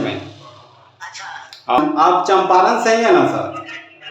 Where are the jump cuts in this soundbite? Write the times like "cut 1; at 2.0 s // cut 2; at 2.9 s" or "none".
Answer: cut 1; at 1.8 s